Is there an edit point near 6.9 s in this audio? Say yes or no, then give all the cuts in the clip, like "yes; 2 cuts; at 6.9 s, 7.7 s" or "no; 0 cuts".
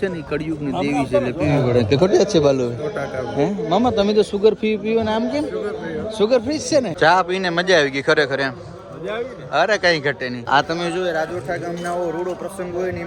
yes; 2 cuts; at 6.9 s, 10.4 s